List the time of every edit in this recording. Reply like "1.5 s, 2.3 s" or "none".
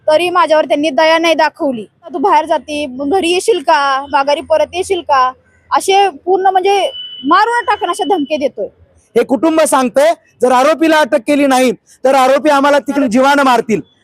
2.1 s, 9.0 s, 13.0 s